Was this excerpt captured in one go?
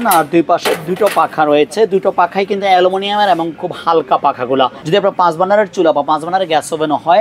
no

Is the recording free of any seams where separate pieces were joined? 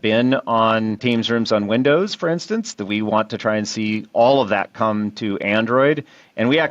no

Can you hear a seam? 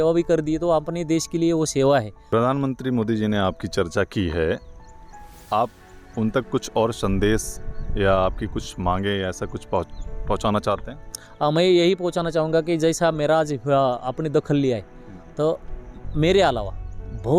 yes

